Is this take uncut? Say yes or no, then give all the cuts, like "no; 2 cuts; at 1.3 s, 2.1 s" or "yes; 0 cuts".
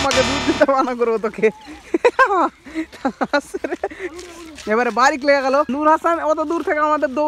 yes; 0 cuts